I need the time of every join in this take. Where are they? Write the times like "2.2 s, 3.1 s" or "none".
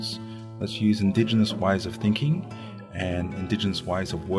none